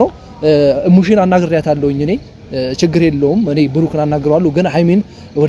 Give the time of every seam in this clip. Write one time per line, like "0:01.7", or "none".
none